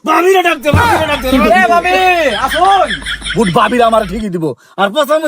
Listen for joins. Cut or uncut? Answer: cut